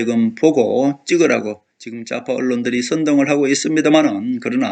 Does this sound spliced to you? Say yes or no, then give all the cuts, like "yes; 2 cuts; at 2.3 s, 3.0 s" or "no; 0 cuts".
no; 0 cuts